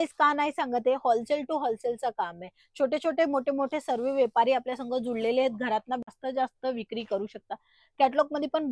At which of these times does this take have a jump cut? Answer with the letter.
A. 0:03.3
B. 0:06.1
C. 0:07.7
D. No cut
B